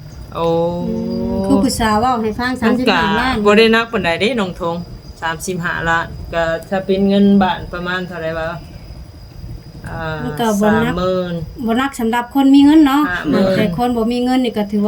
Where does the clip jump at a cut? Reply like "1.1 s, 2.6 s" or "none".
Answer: none